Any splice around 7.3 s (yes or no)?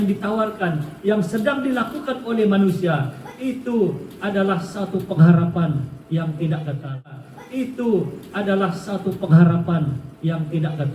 yes